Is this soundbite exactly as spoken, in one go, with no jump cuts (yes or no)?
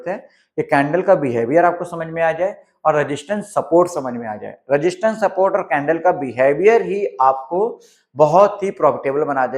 yes